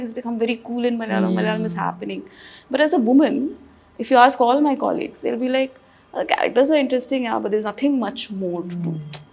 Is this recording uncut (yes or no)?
yes